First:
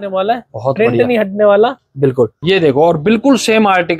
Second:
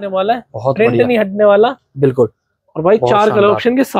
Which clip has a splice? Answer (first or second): first